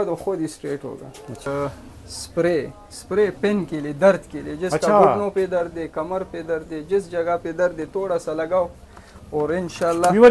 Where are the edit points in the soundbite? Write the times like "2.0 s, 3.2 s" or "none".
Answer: 1.5 s